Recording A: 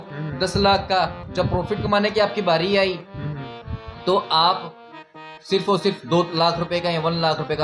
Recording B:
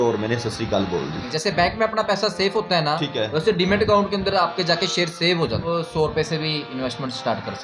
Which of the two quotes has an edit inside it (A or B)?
B